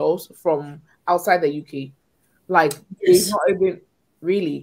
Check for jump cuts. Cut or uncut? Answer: uncut